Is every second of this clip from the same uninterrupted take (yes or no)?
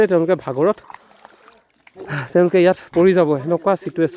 yes